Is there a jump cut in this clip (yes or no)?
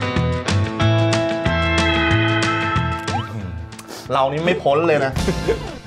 no